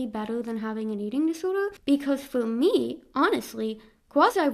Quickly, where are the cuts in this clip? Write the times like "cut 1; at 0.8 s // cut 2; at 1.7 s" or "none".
cut 1; at 1.8 s